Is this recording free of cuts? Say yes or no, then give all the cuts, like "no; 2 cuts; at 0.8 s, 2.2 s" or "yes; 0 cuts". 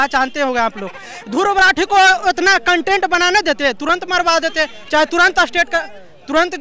yes; 0 cuts